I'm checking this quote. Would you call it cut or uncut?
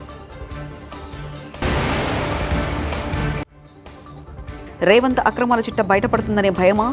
uncut